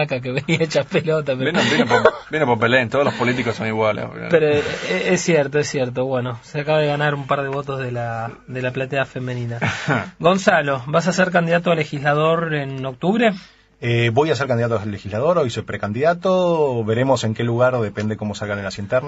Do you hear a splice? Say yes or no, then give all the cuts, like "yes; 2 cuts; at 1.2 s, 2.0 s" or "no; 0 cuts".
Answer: yes; 1 cut; at 14.5 s